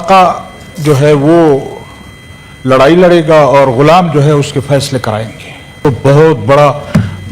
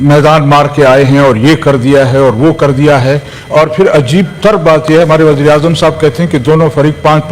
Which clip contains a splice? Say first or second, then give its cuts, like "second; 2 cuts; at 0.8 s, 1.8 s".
first; 1 cut; at 5.8 s